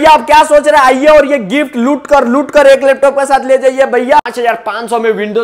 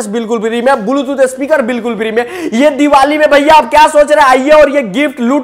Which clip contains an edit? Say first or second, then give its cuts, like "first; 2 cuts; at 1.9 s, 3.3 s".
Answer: first; 1 cut; at 4.2 s